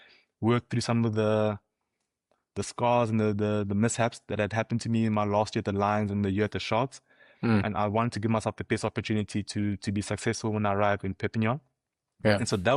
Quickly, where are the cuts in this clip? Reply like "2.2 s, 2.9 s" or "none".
none